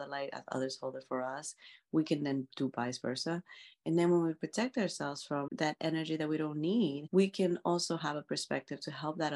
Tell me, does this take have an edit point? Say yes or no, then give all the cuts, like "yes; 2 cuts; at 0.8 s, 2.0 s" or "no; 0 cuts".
yes; 2 cuts; at 5.5 s, 7.0 s